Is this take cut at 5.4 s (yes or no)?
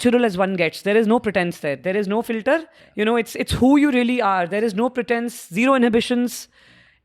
no